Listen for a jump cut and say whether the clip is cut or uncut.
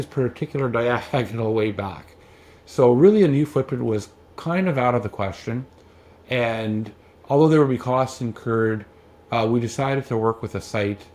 uncut